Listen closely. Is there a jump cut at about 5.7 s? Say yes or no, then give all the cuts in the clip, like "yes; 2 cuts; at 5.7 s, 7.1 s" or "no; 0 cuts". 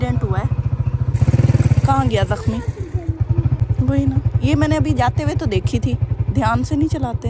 no; 2 cuts; at 1.1 s, 3.6 s